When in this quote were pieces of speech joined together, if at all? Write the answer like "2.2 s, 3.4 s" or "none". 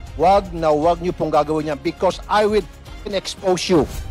none